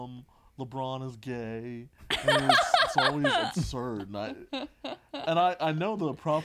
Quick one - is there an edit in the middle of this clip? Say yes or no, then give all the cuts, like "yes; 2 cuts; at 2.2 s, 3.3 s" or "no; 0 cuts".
no; 0 cuts